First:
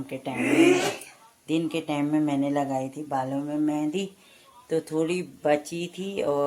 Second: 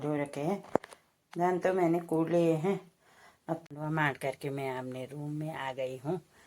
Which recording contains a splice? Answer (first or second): second